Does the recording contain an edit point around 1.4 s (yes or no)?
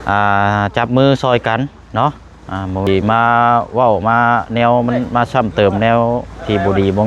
no